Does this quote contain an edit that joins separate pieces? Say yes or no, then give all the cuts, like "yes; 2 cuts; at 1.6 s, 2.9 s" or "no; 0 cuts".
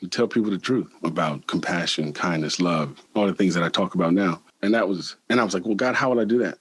yes; 3 cuts; at 0.9 s, 3.0 s, 4.8 s